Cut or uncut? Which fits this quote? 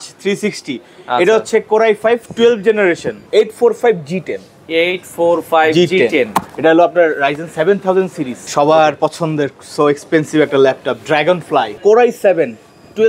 cut